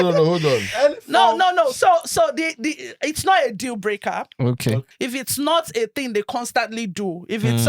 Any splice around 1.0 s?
no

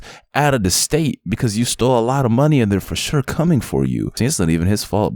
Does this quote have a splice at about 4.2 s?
yes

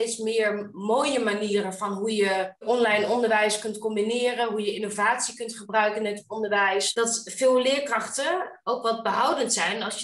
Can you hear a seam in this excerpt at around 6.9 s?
yes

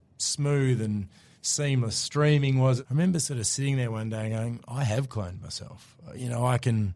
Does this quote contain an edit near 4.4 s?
no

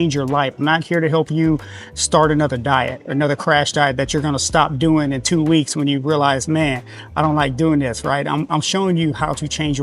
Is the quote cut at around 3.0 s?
no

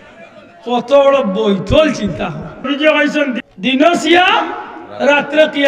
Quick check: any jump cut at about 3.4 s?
yes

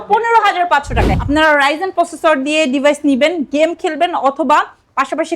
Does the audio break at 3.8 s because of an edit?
no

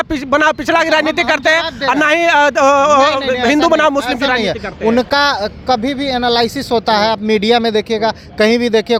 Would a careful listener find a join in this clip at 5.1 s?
no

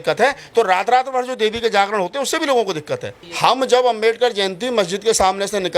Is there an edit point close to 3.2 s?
yes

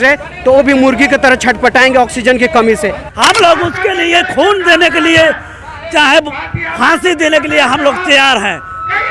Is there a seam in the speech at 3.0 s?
yes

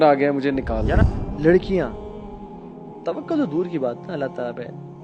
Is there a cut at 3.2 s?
no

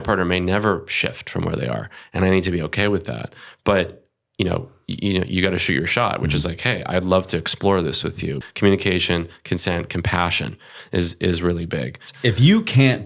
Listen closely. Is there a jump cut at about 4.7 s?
no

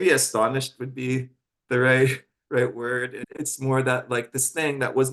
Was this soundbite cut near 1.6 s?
no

